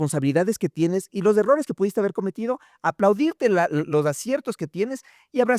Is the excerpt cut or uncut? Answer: uncut